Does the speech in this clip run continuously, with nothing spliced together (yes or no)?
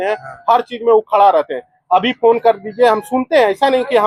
yes